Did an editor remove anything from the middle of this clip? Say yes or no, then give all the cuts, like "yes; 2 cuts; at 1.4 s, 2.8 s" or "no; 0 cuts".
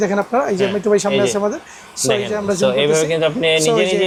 no; 0 cuts